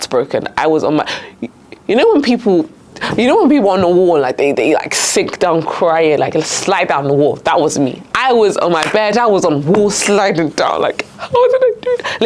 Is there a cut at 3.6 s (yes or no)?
no